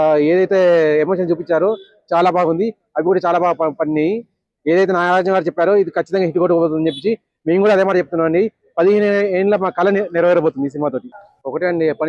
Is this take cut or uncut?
cut